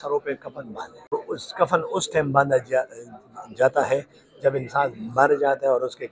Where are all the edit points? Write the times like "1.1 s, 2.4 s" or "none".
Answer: 1.1 s